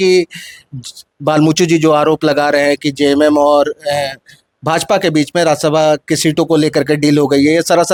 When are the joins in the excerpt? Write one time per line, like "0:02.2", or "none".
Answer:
none